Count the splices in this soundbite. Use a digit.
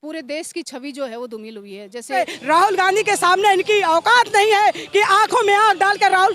1